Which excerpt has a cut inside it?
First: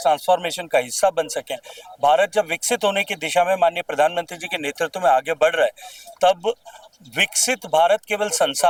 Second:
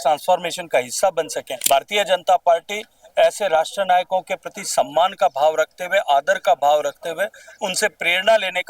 second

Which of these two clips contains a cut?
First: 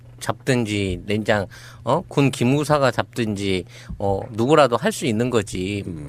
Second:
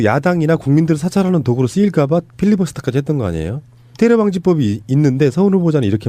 second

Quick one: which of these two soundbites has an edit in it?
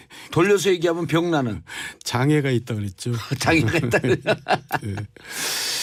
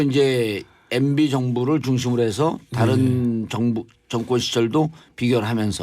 second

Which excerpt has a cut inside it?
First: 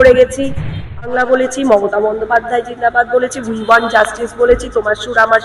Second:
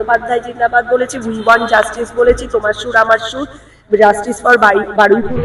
first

